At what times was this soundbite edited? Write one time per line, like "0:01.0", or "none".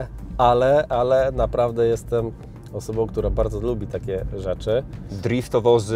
0:05.0

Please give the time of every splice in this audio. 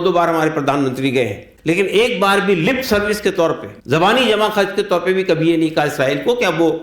0:01.5
0:03.7

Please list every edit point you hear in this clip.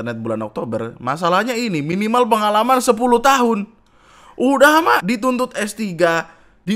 0:05.0

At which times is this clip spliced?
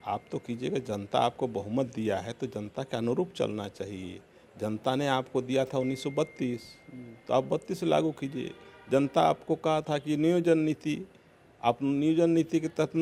none

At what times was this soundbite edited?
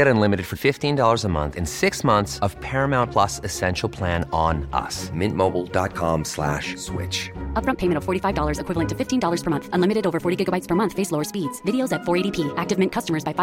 none

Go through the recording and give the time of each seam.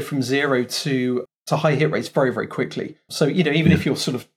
0:01.2
0:03.1

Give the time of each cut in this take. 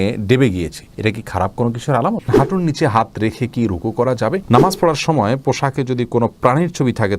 0:02.3
0:04.4

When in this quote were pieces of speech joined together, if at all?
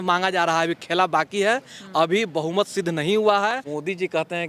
0:03.5

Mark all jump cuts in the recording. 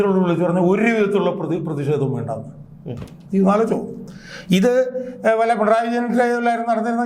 none

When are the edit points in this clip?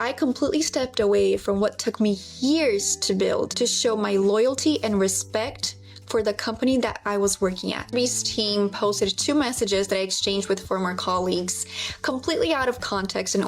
0:07.8

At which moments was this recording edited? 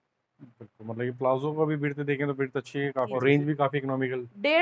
0:03.1

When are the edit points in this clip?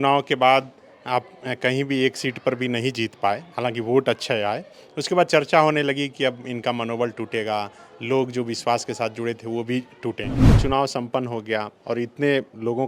0:10.4

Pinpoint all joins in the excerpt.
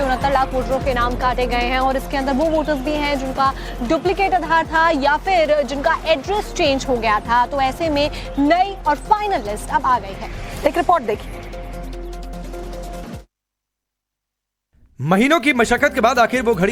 none

